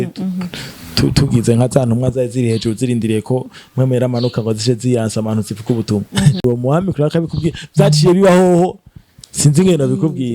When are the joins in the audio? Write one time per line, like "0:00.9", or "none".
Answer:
0:06.4

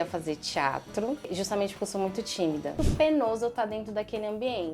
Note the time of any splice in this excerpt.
0:02.8

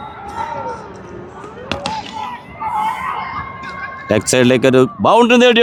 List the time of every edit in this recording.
none

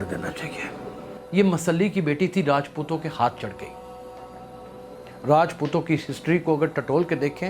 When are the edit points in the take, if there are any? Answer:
0:01.2

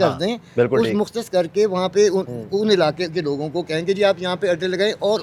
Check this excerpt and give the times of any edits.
none

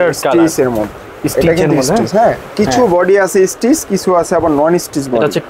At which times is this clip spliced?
none

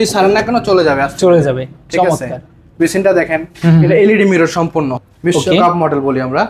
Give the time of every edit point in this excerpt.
0:04.9

